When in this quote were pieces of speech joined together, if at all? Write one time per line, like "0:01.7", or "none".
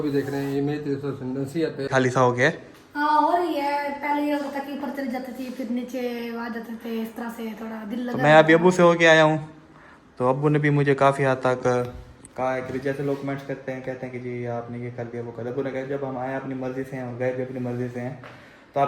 0:01.9